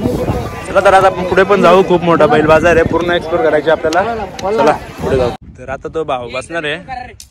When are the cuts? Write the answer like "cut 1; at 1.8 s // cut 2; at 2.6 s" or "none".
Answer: cut 1; at 5.4 s

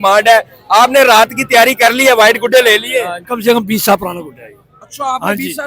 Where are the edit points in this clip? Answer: cut 1; at 3.3 s

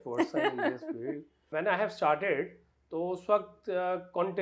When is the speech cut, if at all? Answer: cut 1; at 1.5 s

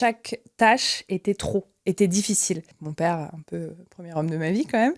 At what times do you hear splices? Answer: cut 1; at 2.8 s

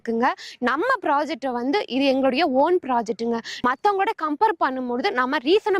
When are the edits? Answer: cut 1; at 3.5 s

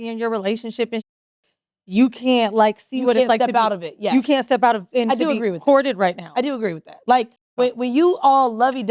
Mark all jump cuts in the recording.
none

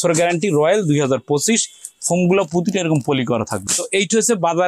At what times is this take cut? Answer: none

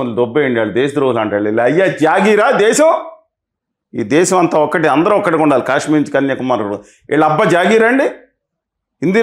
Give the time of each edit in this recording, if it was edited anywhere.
none

